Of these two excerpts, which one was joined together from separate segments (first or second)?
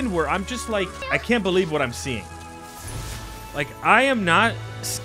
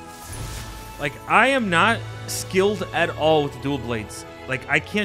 first